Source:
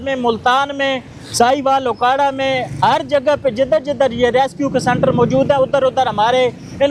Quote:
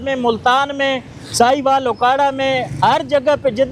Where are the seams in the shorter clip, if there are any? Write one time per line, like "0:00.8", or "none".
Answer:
none